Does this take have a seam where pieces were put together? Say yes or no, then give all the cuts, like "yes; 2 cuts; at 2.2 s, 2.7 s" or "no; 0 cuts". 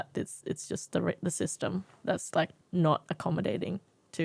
yes; 1 cut; at 2.6 s